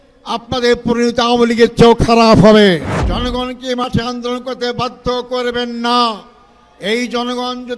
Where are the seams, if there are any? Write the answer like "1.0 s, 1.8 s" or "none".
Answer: 3.0 s